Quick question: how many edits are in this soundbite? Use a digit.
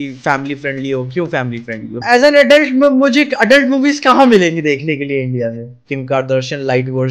2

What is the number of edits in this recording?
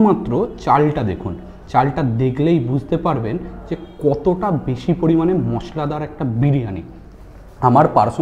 0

